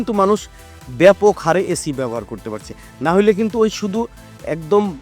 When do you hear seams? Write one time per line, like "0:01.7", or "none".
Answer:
none